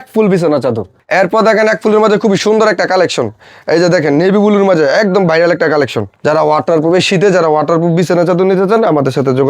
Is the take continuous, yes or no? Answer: no